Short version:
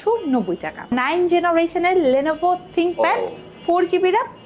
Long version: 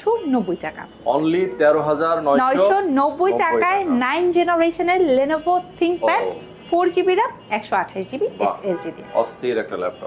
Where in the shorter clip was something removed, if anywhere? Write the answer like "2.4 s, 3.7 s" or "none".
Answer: 0.9 s